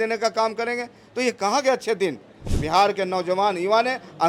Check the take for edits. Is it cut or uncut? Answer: cut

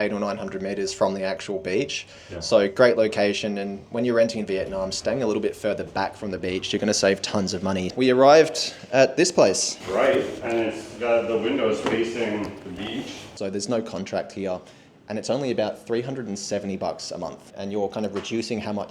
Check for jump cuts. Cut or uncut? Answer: cut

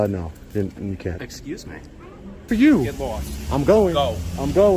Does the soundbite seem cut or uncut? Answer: cut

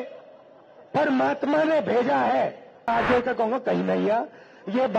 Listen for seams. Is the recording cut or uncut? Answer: cut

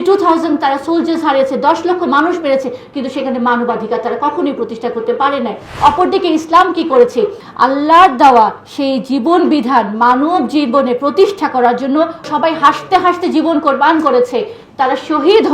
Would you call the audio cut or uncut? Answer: cut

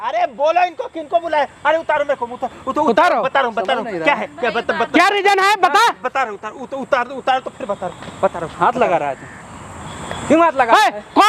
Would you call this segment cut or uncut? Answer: uncut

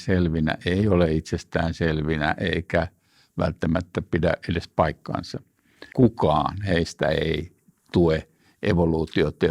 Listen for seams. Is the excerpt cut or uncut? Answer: cut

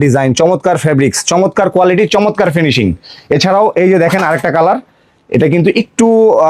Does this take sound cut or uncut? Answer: uncut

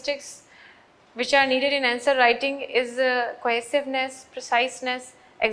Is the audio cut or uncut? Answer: uncut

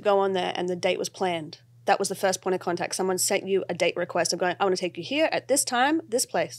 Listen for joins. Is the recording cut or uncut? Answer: uncut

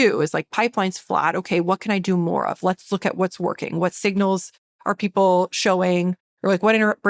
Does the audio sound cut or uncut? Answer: uncut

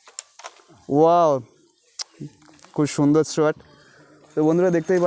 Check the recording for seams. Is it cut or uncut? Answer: uncut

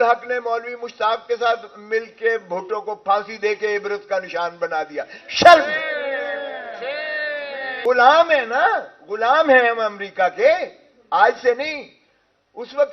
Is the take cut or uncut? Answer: cut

